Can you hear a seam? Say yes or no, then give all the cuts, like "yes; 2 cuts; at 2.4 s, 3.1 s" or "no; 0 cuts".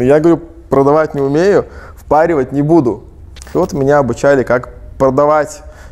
yes; 1 cut; at 3.5 s